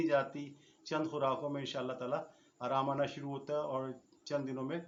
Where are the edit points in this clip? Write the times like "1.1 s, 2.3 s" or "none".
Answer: none